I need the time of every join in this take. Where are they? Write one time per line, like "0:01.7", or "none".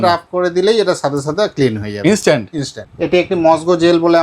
0:02.8